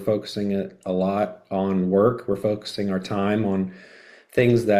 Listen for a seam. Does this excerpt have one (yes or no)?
no